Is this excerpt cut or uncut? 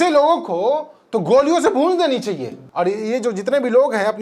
cut